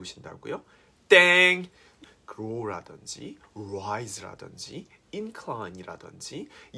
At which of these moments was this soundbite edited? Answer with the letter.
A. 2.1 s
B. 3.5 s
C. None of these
A